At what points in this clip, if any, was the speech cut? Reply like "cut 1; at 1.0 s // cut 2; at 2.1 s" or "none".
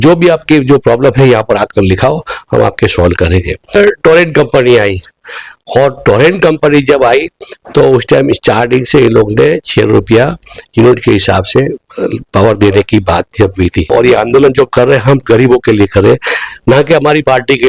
cut 1; at 3.7 s // cut 2; at 13.9 s